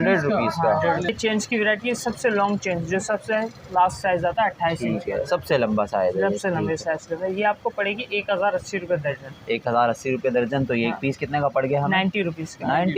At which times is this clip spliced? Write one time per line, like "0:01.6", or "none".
0:01.1

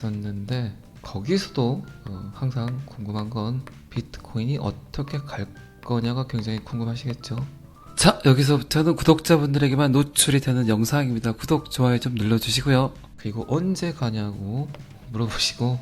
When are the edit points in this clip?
0:07.8
0:13.1

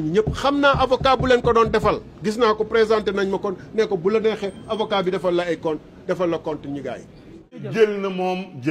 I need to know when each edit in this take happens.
0:07.6

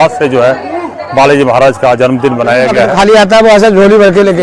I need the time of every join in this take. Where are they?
0:02.9

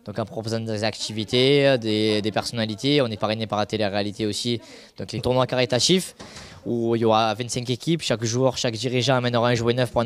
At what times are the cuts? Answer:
none

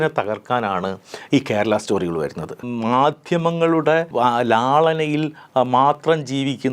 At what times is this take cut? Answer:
0:02.7
0:04.1

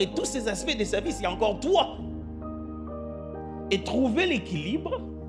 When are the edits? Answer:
none

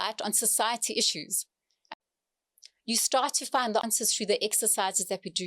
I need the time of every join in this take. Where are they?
0:01.8
0:03.8

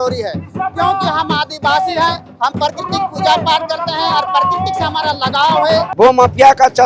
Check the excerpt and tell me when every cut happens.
0:05.9

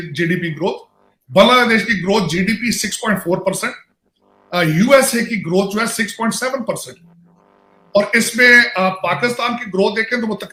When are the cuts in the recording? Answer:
none

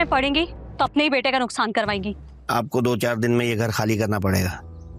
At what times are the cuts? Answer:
0:02.4

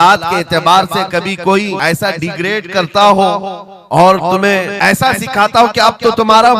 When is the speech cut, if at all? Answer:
0:01.8
0:04.7

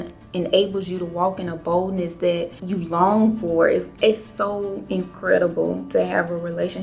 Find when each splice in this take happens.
0:02.6
0:03.9

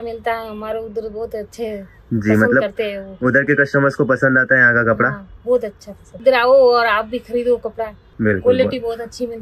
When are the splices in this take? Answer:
0:06.2
0:08.0

